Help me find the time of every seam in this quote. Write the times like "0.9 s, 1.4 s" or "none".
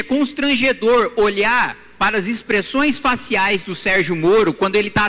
none